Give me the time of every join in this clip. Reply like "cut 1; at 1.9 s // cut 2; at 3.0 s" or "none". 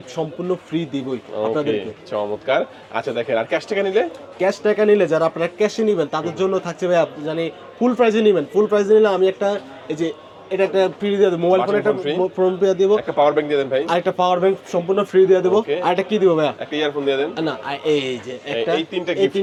none